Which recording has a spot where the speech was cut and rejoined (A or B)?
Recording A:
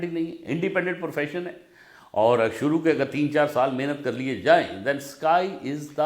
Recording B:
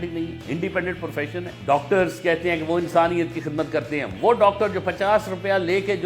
B